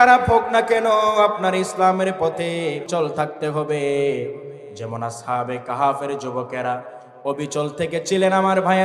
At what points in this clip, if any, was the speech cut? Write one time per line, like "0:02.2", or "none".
0:02.9

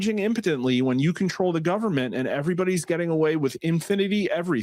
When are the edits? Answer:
none

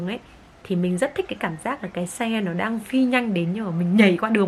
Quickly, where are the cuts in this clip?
none

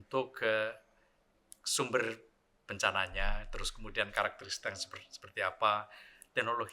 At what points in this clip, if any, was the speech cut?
none

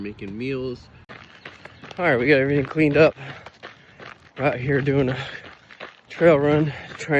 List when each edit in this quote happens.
0:00.9

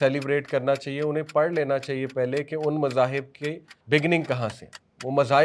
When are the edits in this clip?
0:03.7

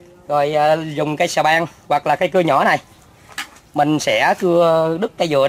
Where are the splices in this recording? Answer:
none

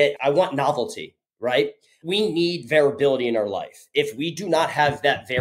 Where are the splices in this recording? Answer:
none

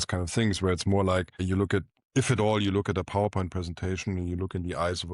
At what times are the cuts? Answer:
0:01.4

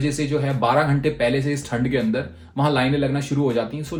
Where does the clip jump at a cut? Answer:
none

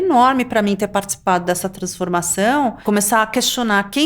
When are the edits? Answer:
0:02.8

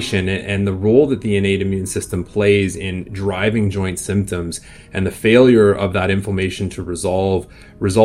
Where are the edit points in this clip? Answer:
none

